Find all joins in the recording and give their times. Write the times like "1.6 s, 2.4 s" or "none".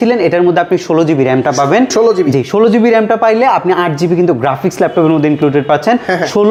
none

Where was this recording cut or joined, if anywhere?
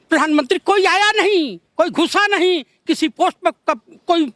none

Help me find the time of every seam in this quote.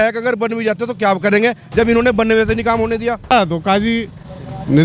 3.3 s

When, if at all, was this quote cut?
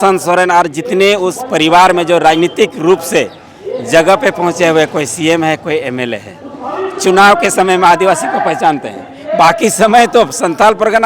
none

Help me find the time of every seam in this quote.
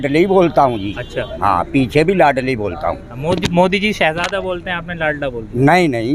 none

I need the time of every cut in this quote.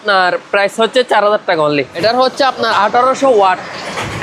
1.9 s

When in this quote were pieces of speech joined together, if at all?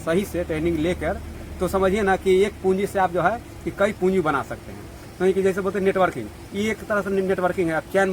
none

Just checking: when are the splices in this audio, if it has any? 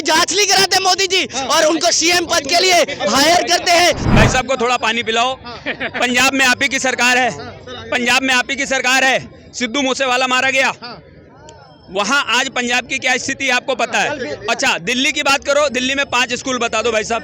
4.1 s

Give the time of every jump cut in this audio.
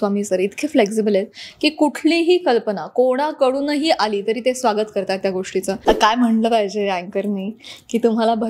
5.8 s

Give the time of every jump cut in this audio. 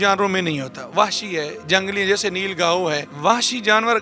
3.1 s

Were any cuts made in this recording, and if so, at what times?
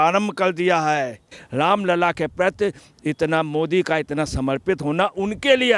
1.4 s

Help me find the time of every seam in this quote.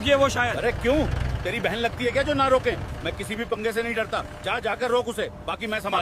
none

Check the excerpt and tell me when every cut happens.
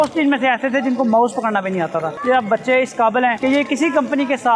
2.1 s, 3.4 s

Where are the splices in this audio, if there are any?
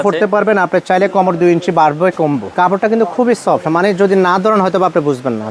2.5 s

